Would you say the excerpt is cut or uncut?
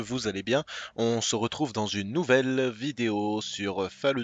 uncut